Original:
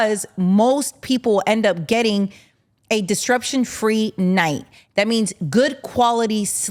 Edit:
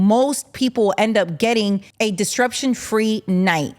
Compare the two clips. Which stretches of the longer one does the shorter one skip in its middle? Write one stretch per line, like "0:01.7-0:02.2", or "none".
0:02.4-0:02.8